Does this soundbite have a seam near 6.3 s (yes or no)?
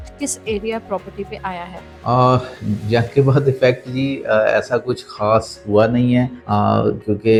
no